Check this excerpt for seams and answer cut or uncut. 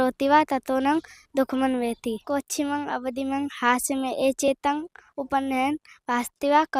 cut